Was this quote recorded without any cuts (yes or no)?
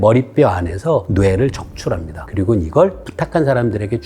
no